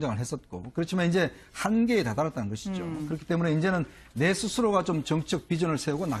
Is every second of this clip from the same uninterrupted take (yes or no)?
no